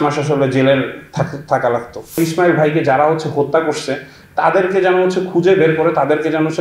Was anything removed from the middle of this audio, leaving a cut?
yes; 1 cut; at 2.2 s

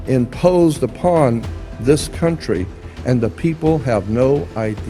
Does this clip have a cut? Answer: no; 0 cuts

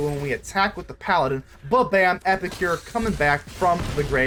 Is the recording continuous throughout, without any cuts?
yes; 0 cuts

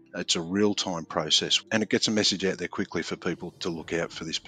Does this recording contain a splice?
yes; 2 cuts; at 1.6 s, 3.5 s

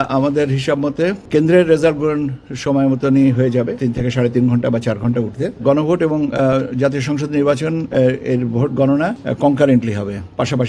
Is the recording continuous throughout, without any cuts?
no; 4 cuts; at 1.2 s, 3.7 s, 5.6 s, 9.2 s

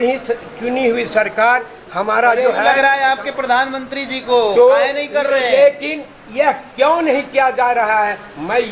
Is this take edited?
yes; 1 cut; at 2.8 s

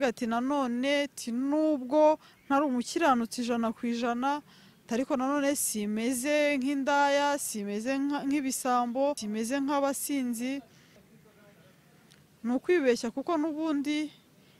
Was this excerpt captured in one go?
no; 2 cuts; at 9.2 s, 11.0 s

